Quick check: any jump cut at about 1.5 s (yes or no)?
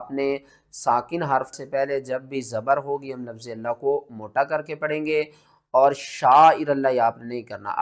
yes